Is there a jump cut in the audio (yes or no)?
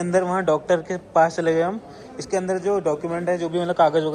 no